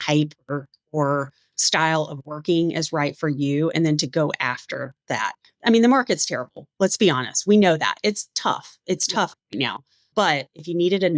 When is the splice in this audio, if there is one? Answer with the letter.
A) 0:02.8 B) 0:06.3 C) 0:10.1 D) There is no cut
C